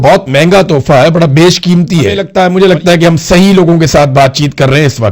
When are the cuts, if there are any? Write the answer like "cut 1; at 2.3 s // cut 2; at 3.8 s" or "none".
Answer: cut 1; at 2.2 s